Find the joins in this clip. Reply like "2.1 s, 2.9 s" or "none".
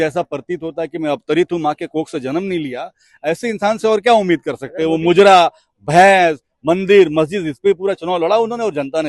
none